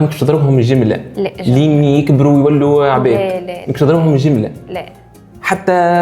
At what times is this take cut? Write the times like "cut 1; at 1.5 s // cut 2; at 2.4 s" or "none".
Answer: none